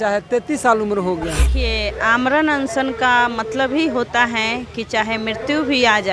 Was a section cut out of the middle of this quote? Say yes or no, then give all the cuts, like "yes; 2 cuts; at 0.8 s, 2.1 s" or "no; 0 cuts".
yes; 1 cut; at 1.6 s